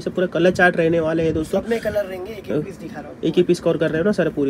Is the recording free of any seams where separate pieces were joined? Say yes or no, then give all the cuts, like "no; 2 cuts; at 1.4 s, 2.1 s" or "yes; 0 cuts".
yes; 0 cuts